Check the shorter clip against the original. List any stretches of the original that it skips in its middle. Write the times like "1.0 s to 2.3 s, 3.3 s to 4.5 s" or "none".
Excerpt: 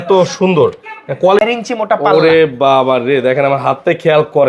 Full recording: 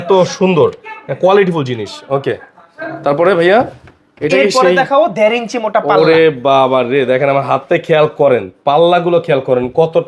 1.4 s to 5.2 s